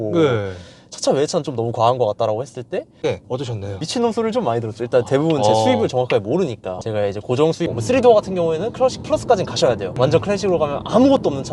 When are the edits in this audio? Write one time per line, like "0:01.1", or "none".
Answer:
0:03.0
0:07.8